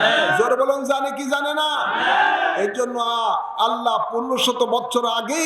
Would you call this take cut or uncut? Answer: uncut